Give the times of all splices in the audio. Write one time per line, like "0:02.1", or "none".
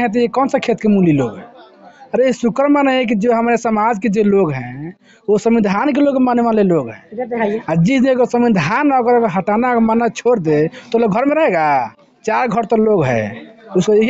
none